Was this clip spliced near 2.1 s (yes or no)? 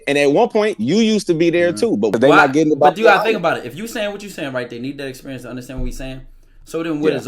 yes